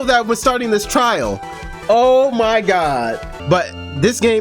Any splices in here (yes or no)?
yes